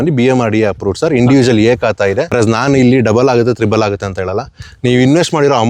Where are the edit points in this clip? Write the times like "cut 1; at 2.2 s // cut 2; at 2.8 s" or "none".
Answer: cut 1; at 2.3 s